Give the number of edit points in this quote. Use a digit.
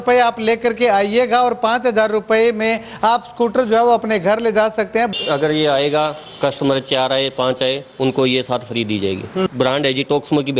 2